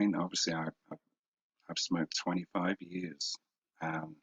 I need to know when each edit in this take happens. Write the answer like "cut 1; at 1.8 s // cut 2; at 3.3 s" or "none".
cut 1; at 2.1 s